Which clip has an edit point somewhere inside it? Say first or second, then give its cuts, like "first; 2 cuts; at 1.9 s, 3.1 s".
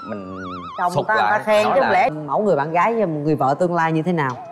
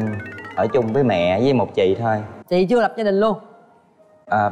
first; 1 cut; at 2.1 s